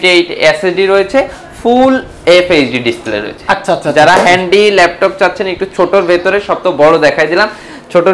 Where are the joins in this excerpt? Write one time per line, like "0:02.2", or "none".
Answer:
none